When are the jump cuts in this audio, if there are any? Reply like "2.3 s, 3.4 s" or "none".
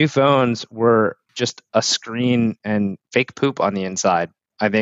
1.3 s, 3.0 s